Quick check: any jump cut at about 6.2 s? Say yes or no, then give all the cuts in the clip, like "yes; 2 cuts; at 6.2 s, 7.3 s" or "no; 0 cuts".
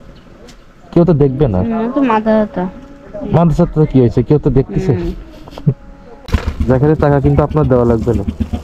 yes; 1 cut; at 6.2 s